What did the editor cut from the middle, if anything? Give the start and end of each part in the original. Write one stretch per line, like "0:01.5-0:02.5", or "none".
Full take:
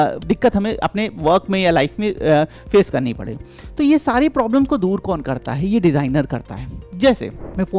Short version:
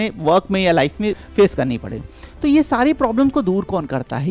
0:02.2-0:02.5